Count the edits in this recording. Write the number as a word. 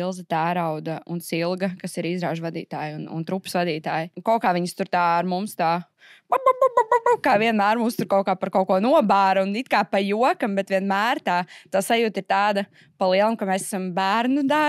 two